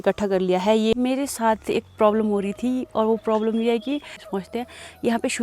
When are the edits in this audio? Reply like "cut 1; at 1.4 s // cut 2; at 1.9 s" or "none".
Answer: cut 1; at 0.9 s // cut 2; at 4.2 s